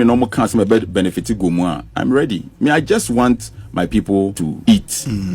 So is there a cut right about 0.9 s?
no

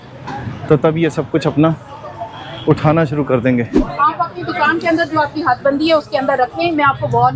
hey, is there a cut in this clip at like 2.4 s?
no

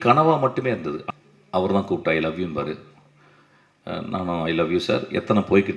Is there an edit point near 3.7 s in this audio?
no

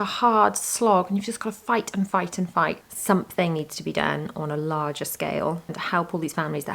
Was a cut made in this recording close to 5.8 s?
yes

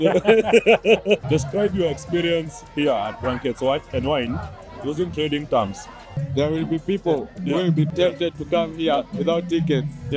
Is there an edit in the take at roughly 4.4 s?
no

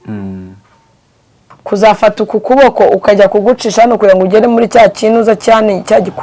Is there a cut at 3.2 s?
no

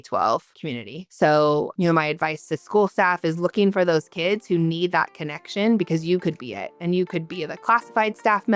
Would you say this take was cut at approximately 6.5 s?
no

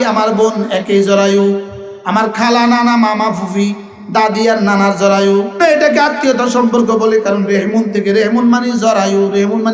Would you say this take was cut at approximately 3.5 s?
no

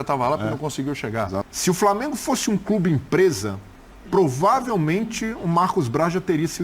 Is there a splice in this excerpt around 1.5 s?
yes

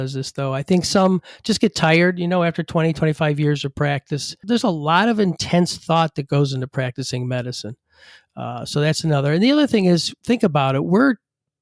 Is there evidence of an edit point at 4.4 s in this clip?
yes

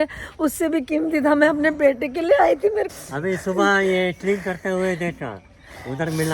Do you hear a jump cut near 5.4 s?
no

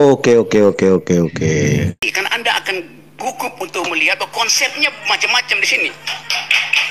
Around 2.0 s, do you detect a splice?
yes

